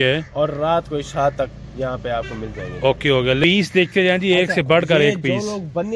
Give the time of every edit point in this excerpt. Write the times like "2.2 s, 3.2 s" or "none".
3.4 s